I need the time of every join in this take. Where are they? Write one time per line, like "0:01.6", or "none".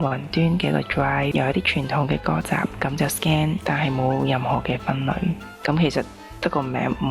0:01.3
0:03.6
0:05.5